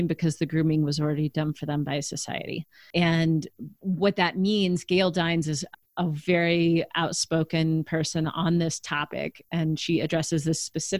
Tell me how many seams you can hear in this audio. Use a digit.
2